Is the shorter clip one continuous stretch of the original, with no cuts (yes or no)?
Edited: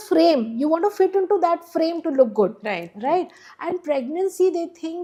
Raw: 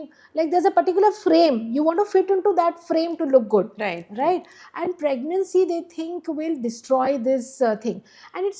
yes